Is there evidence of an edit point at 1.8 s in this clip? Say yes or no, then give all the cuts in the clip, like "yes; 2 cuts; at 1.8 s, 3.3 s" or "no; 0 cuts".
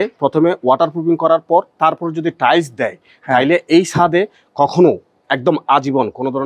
no; 0 cuts